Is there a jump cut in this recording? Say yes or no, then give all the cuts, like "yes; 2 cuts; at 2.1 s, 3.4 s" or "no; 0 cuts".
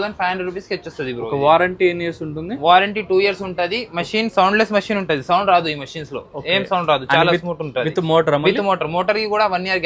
no; 0 cuts